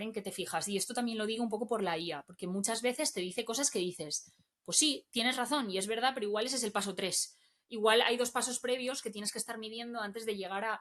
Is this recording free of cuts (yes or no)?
yes